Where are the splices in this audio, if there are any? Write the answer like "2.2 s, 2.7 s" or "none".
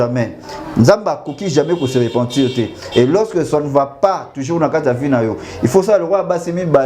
none